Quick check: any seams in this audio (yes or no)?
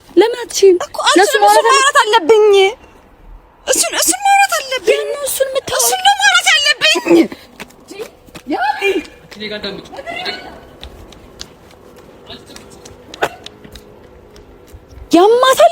no